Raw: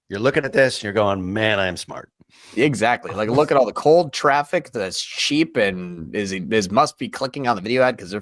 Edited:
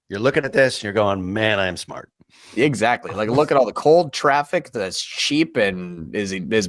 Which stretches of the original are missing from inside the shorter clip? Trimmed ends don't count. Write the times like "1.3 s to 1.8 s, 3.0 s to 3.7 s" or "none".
none